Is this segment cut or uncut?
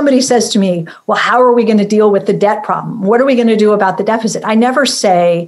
uncut